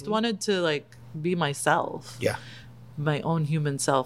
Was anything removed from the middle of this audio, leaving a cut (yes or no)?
no